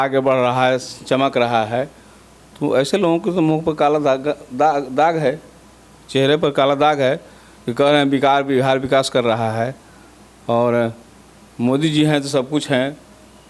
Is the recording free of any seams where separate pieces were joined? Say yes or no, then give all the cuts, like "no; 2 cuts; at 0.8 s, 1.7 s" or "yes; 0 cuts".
yes; 0 cuts